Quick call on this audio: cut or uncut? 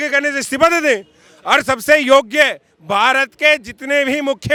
uncut